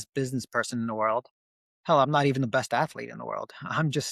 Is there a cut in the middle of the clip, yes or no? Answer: no